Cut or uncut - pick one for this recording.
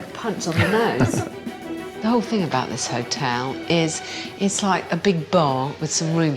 cut